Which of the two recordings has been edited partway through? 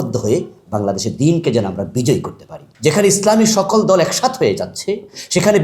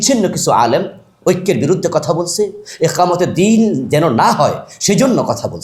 first; 1 cut; at 2.7 s

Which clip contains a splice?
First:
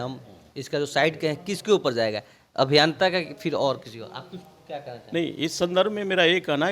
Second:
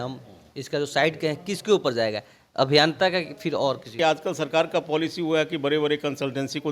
second; 1 cut; at 3.9 s

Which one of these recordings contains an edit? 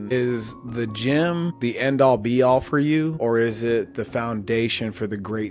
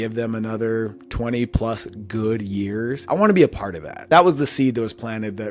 second; 3 cuts; at 1.0 s, 3.0 s, 4.0 s

